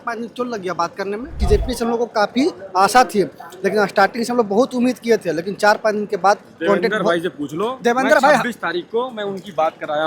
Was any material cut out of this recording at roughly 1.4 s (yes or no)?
yes